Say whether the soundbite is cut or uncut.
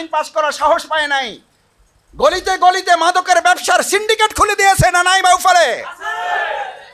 uncut